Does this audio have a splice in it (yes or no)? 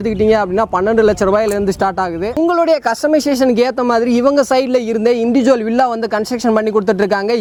no